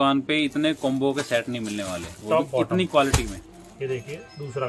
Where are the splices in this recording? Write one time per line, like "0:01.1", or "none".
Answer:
none